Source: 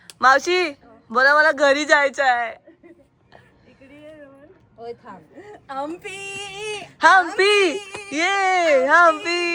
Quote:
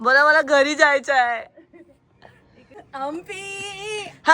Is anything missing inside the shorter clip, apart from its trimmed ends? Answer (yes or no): yes